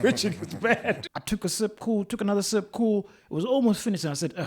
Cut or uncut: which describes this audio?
cut